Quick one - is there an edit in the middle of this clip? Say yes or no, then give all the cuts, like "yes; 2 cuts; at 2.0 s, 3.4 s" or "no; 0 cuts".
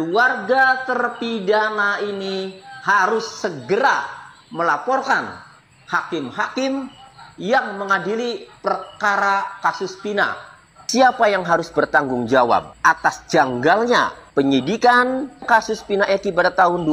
no; 0 cuts